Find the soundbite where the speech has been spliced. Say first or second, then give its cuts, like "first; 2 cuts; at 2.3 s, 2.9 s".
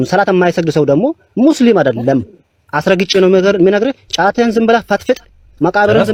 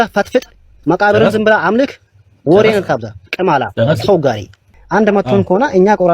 second; 1 cut; at 4.6 s